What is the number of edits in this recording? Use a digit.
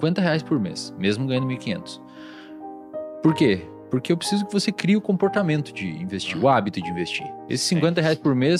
0